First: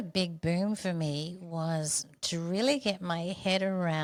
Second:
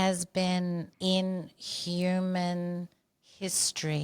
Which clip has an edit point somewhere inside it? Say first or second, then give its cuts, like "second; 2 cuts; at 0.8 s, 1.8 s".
second; 1 cut; at 0.9 s